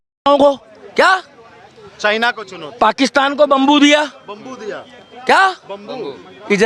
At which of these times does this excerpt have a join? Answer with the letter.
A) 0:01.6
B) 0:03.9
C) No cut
C